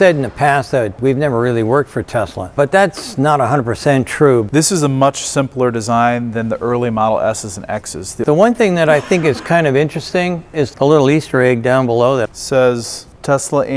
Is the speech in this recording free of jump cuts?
no; 5 cuts; at 1.0 s, 2.5 s, 4.5 s, 8.2 s, 10.6 s

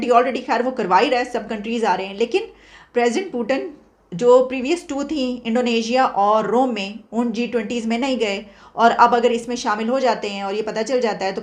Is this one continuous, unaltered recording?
yes; 0 cuts

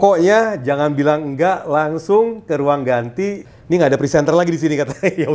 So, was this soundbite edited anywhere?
yes; 1 cut; at 3.4 s

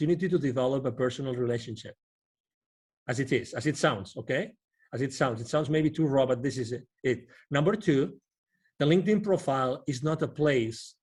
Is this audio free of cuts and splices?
yes; 0 cuts

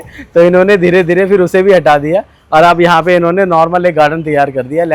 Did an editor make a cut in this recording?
no; 0 cuts

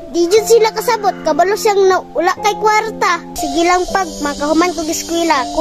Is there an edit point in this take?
yes; 1 cut; at 3.3 s

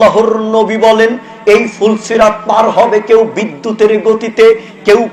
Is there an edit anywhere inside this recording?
no; 0 cuts

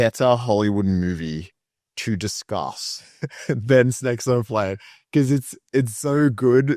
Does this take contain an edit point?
no; 0 cuts

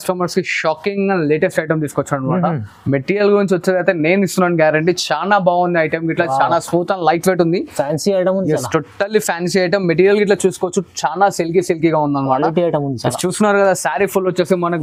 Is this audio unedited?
yes; 0 cuts

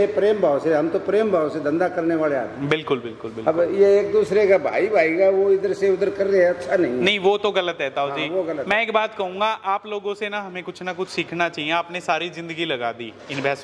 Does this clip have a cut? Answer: no; 0 cuts

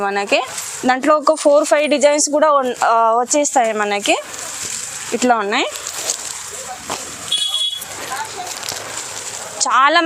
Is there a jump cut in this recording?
no; 0 cuts

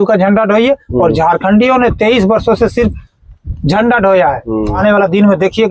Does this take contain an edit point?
yes; 1 cut; at 4.8 s

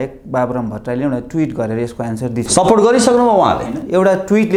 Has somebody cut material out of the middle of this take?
no; 0 cuts

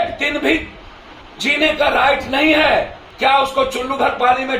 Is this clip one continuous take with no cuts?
no; 1 cut; at 3.0 s

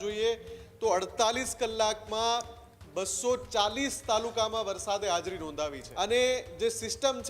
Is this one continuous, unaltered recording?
no; 1 cut; at 5.8 s

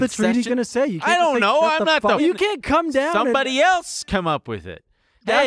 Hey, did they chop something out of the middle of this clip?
yes; 1 cut; at 2.2 s

